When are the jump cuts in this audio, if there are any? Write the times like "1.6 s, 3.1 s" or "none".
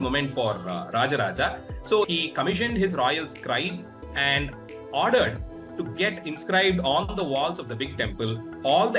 2.1 s